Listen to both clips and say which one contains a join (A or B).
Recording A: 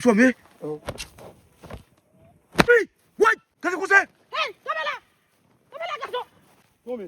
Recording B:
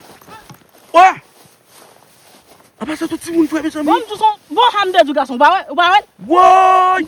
A